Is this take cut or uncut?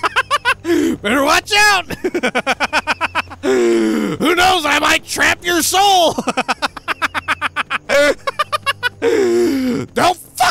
uncut